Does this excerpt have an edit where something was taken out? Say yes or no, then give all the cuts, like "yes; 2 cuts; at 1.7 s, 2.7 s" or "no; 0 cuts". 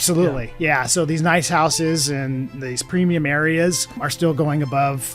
yes; 1 cut; at 4.0 s